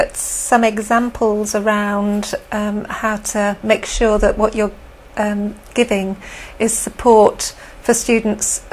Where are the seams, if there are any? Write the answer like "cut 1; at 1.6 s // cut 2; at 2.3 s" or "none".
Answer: cut 1; at 5.6 s